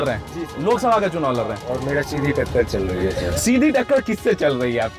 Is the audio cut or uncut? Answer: uncut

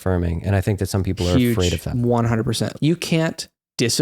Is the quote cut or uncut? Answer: cut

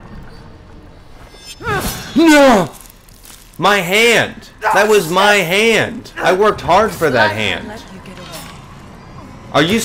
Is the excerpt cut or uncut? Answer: uncut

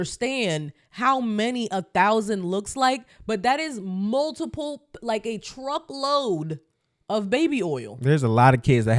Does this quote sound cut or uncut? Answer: uncut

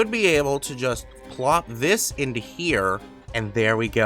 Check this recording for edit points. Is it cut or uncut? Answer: cut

